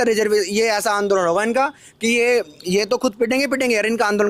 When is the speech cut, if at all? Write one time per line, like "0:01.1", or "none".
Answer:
none